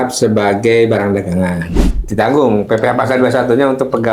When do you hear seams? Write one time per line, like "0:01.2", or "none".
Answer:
0:01.9

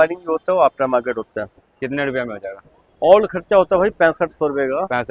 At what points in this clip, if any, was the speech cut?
none

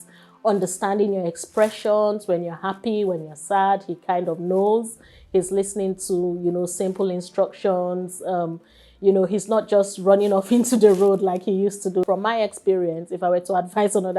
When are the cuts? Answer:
0:12.0

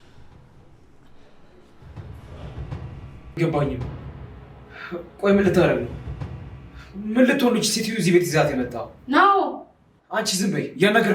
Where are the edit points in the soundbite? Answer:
0:03.4

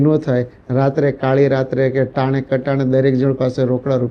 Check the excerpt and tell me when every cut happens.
none

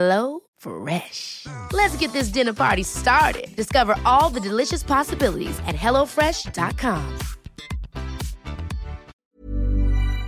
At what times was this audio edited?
0:09.1

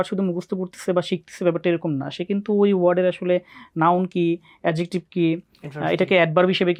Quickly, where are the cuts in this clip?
none

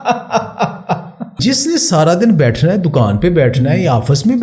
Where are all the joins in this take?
0:01.4

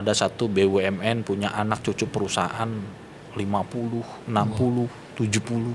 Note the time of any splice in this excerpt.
none

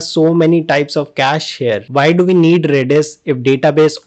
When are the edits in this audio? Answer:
0:01.9

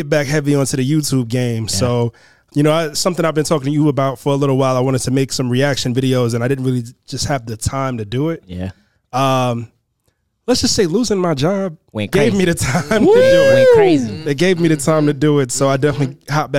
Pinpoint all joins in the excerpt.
0:02.5

